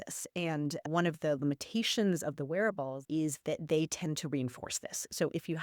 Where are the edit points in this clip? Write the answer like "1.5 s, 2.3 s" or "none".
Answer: 3.0 s